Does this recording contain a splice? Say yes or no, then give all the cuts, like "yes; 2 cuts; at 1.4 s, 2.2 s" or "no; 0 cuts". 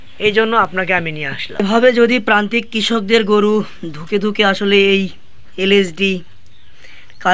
yes; 1 cut; at 1.6 s